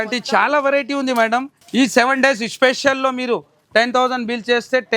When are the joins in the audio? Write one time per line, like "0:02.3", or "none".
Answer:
0:01.6